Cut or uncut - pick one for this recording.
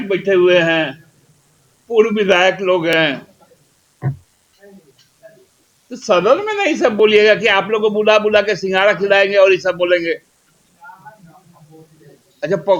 uncut